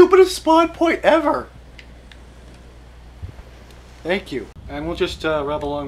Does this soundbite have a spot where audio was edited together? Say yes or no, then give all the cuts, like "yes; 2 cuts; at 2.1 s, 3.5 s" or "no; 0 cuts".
yes; 1 cut; at 4.6 s